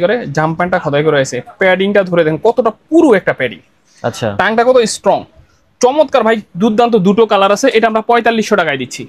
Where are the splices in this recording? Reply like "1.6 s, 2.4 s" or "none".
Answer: none

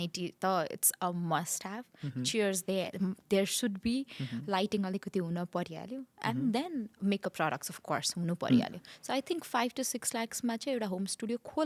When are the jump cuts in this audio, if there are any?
none

